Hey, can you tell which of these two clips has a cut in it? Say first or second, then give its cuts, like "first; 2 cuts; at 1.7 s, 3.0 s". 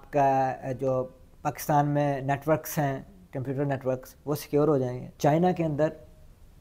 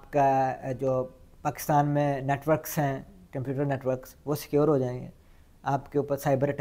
first; 1 cut; at 5.0 s